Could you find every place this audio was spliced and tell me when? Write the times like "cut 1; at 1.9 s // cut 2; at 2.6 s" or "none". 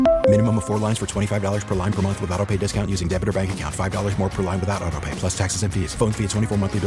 none